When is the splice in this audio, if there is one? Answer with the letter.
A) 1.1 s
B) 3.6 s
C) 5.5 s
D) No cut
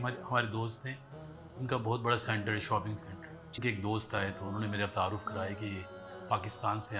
B